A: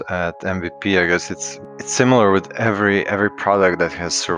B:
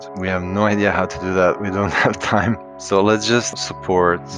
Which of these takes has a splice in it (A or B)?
B